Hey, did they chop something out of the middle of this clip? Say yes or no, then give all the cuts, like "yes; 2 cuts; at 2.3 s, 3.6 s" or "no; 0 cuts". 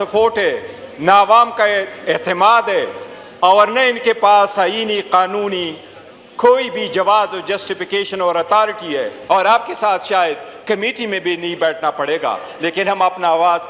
yes; 1 cut; at 9.2 s